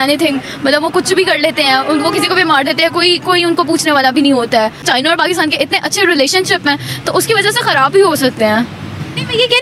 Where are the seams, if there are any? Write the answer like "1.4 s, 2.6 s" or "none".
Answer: none

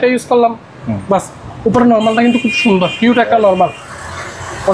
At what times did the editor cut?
none

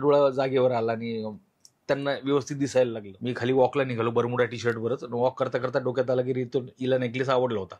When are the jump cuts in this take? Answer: 3.1 s

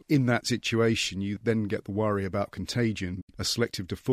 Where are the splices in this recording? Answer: 3.2 s

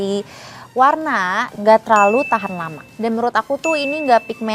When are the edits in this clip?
none

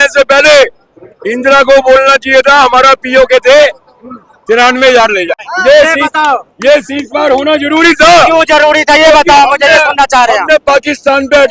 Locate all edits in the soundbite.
5.5 s

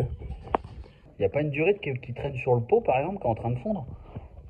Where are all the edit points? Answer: 1.1 s

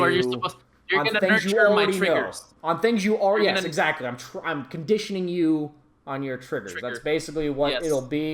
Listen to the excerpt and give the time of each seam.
none

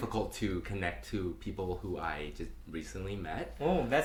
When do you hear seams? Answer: none

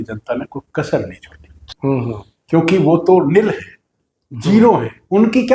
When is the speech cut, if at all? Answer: 1.6 s

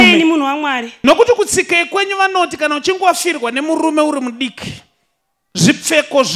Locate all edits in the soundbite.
1.0 s

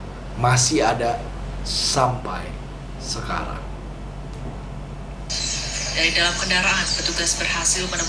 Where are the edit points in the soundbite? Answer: 5.3 s

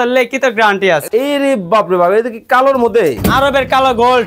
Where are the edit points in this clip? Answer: 1.0 s

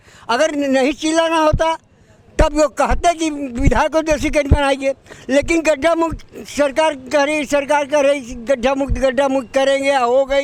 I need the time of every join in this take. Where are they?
none

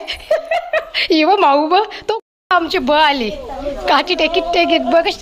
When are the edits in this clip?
2.0 s

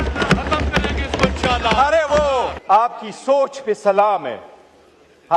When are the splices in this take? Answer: 2.5 s

